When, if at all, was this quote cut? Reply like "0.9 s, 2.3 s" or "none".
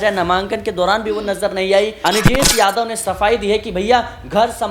2.0 s